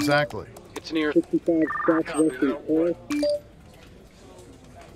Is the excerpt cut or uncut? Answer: cut